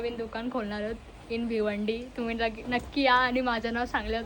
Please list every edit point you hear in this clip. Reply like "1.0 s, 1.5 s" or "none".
none